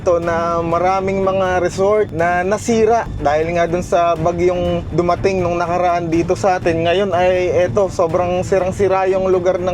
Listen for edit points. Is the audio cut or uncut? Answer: cut